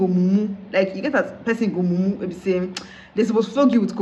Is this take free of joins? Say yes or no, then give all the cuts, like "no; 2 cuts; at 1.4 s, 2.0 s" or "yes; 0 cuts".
yes; 0 cuts